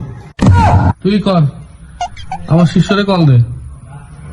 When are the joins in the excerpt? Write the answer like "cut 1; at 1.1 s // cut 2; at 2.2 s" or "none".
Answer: cut 1; at 0.9 s